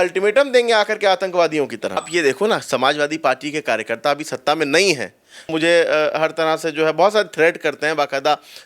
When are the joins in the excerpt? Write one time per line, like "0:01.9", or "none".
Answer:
0:02.0
0:05.5